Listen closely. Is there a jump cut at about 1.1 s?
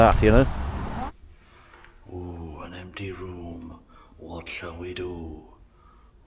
yes; 1 cut; at 1.1 s

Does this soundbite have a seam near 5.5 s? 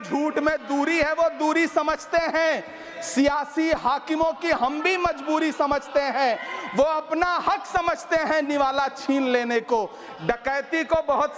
no; 0 cuts

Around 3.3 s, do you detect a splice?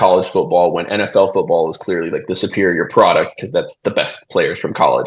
no; 0 cuts

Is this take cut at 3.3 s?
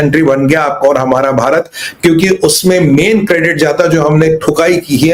no; 0 cuts

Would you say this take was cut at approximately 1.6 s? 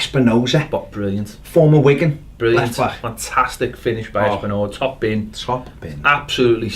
no; 1 cut; at 3.9 s

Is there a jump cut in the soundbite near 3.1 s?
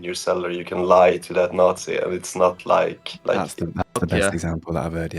yes; 1 cut; at 3.1 s

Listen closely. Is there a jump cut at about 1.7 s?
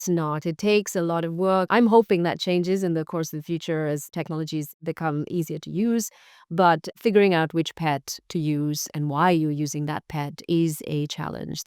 yes; 2 cuts; at 1.7 s, 4.7 s

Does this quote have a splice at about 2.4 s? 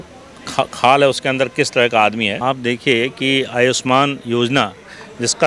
yes; 1 cut; at 2.4 s

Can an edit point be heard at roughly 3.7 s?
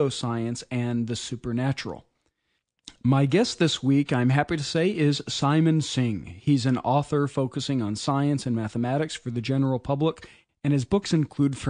yes; 1 cut; at 3.7 s

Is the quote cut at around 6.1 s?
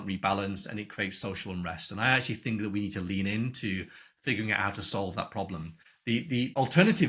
yes; 1 cut; at 6.1 s

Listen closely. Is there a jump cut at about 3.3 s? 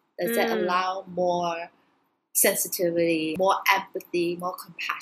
yes; 1 cut; at 3.3 s

